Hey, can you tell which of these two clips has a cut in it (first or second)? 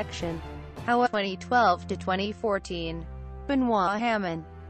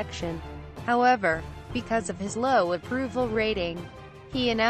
second